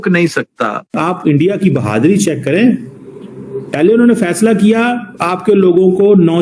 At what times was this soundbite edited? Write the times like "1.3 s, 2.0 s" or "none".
0.9 s